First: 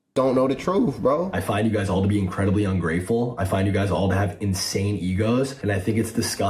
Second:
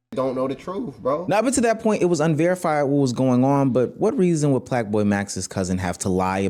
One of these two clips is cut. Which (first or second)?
first